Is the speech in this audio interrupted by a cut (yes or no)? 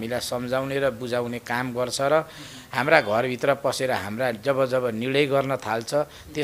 no